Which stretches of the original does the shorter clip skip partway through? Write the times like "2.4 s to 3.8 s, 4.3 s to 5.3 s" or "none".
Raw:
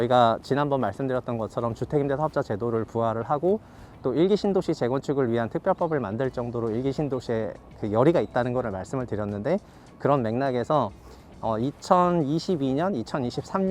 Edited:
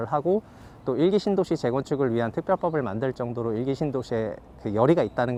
none